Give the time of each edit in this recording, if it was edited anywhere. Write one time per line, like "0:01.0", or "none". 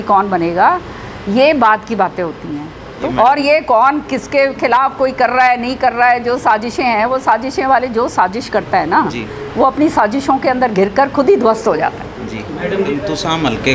0:03.0
0:12.9